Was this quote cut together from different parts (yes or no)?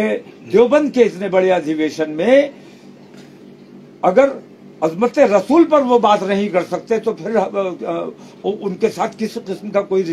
no